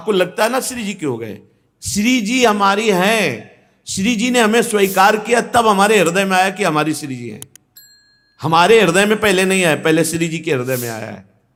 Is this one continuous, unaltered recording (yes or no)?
yes